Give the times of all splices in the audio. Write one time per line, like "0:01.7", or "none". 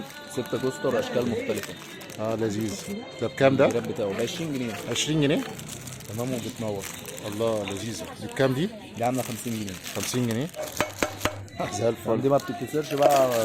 0:05.5
0:10.6